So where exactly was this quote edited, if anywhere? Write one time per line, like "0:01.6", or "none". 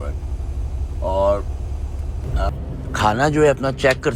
0:02.5